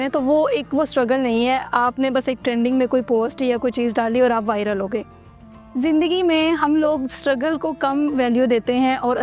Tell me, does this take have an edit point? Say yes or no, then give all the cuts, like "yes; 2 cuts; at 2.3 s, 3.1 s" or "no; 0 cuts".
no; 0 cuts